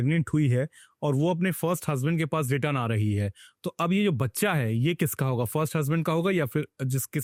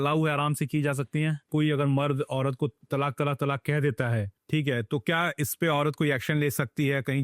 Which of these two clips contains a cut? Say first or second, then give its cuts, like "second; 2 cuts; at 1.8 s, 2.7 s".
second; 3 cuts; at 1.5 s, 2.8 s, 4.3 s